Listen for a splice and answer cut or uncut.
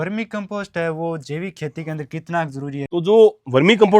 cut